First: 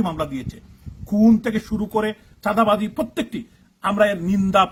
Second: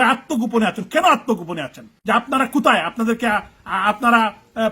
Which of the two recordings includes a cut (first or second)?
second